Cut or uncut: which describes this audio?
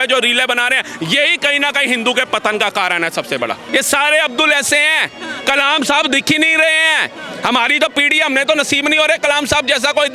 cut